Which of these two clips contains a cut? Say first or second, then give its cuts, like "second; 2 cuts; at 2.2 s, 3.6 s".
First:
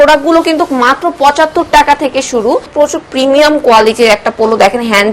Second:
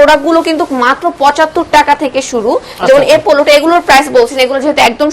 first; 1 cut; at 2.7 s